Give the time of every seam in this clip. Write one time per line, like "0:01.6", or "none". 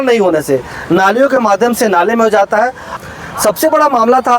0:03.0